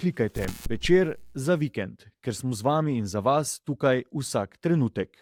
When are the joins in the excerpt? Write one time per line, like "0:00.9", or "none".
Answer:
none